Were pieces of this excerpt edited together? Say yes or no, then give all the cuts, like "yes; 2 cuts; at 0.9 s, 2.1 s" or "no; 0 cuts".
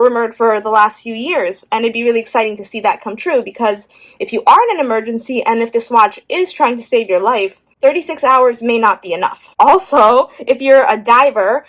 yes; 1 cut; at 9.4 s